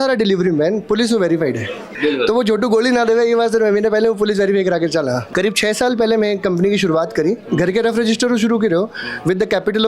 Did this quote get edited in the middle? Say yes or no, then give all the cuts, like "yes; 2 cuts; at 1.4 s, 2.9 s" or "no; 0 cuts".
yes; 2 cuts; at 1.9 s, 5.2 s